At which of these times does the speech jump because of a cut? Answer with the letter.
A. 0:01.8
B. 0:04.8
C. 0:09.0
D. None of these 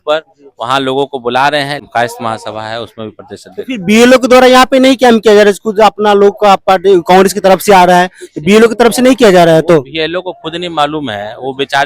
A